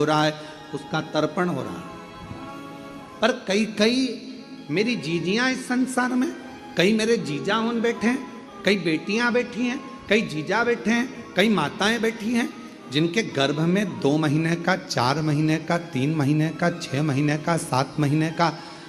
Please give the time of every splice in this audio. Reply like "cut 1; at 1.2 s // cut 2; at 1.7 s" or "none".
none